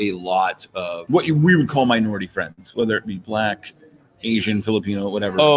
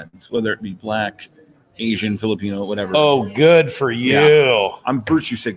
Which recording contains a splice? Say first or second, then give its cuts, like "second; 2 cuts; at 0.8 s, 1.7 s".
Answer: first; 1 cut; at 1.0 s